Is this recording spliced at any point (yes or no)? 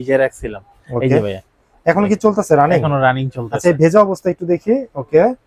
no